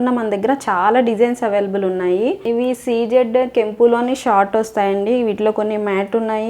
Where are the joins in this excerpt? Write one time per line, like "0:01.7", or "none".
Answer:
0:02.4